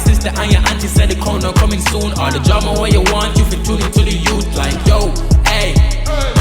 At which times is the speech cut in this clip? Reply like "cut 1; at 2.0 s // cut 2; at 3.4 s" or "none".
none